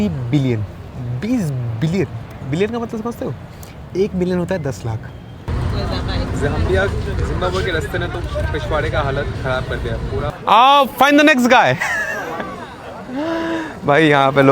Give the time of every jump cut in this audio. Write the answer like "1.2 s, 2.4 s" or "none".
5.5 s, 10.3 s